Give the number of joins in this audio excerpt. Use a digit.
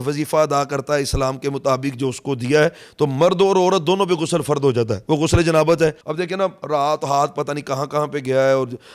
1